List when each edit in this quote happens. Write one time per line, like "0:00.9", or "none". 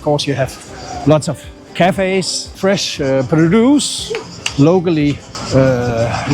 0:02.6
0:05.3